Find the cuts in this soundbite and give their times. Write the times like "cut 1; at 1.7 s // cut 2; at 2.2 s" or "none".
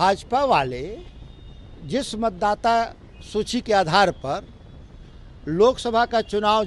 none